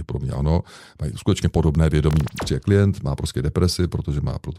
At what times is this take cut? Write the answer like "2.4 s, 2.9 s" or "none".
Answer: 2.4 s